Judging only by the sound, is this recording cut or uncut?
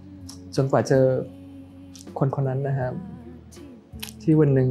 uncut